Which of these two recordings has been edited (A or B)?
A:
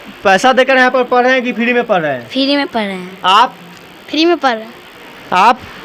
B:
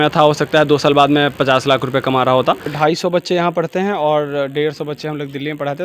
B